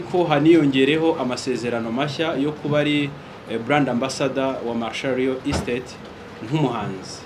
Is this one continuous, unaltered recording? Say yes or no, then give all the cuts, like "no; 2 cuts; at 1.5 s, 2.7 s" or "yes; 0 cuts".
yes; 0 cuts